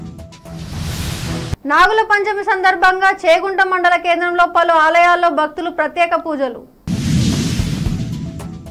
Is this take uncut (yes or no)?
no